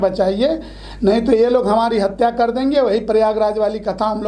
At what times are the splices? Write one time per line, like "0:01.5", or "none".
none